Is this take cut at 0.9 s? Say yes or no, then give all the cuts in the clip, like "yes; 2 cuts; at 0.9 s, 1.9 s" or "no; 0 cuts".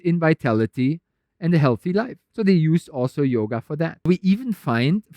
no; 2 cuts; at 2.2 s, 4.1 s